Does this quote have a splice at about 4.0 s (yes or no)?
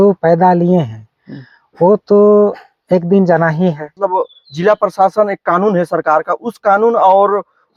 yes